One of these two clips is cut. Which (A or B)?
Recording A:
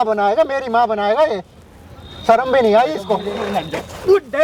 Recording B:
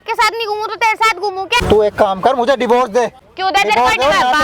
B